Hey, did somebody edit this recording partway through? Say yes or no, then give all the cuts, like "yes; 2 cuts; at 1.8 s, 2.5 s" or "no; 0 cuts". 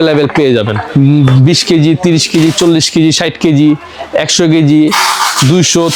yes; 1 cut; at 0.9 s